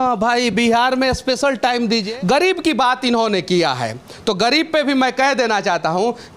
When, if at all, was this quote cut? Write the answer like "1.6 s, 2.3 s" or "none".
2.1 s